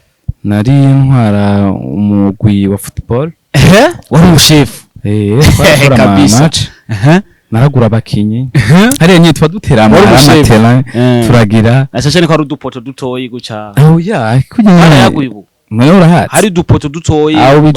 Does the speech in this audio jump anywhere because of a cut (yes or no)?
no